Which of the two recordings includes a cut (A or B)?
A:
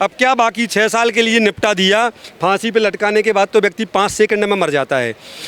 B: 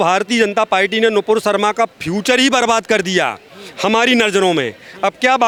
A